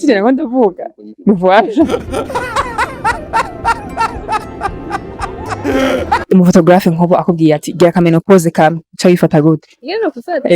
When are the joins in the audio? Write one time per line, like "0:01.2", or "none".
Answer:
0:06.2